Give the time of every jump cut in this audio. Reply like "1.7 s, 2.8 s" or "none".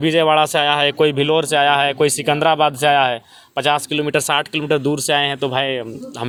none